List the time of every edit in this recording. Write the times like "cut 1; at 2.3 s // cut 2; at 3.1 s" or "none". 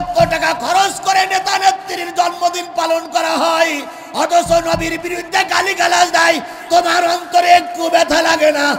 none